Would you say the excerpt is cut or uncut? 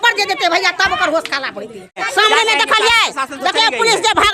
cut